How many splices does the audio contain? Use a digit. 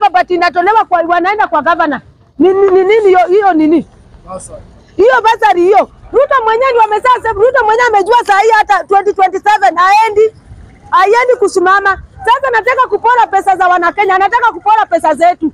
0